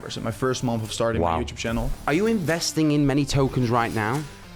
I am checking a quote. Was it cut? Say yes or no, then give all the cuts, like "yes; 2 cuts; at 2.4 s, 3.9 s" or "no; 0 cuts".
yes; 1 cut; at 1.9 s